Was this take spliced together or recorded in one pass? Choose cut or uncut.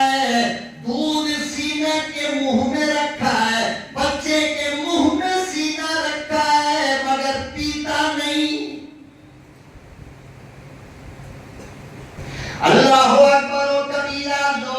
cut